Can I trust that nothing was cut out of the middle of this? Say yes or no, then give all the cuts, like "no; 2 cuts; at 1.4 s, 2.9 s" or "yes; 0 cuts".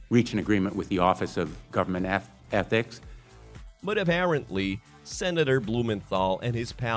yes; 0 cuts